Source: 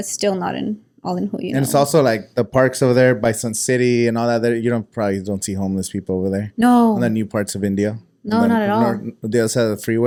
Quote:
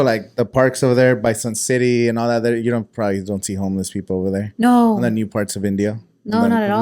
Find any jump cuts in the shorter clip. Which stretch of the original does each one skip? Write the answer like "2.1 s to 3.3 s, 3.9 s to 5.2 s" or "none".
none